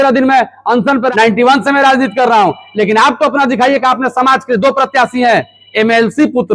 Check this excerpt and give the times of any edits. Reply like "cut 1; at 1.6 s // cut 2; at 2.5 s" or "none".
cut 1; at 1.1 s